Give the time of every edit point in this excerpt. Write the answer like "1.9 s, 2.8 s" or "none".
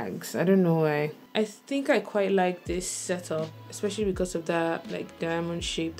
1.2 s